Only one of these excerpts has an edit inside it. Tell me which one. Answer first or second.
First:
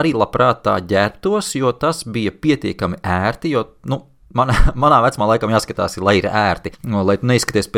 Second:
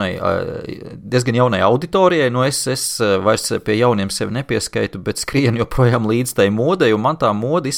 first